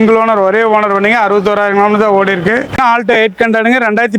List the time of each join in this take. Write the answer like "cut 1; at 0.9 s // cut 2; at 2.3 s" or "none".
cut 1; at 2.8 s

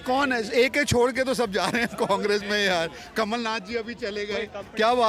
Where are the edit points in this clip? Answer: none

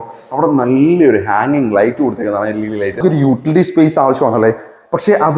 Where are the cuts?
cut 1; at 3.0 s

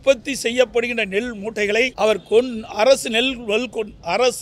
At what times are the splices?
cut 1; at 1.9 s

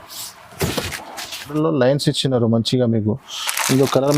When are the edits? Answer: cut 1; at 1.5 s

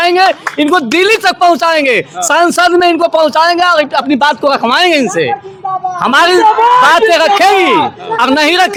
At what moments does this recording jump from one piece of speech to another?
none

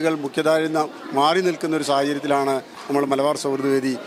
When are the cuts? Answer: none

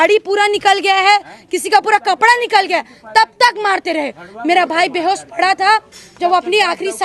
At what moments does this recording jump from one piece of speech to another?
none

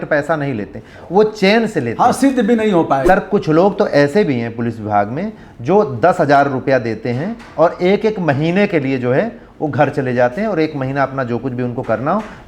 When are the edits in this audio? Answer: cut 1; at 3.0 s

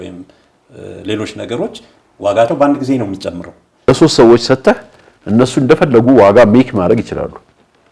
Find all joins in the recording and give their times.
cut 1; at 3.7 s

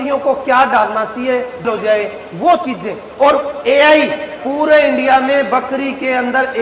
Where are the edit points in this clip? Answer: cut 1; at 1.6 s

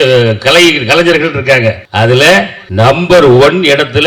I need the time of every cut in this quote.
cut 1; at 1.8 s // cut 2; at 2.6 s

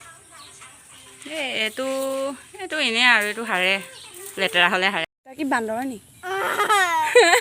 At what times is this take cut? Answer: cut 1; at 5.0 s

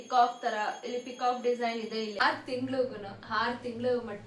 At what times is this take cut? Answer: cut 1; at 2.1 s

